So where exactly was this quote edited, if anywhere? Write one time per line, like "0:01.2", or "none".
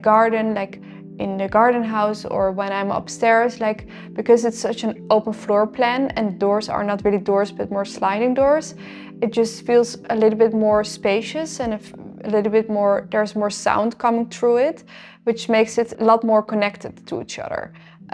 none